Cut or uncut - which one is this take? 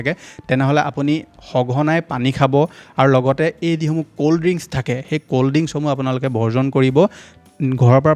uncut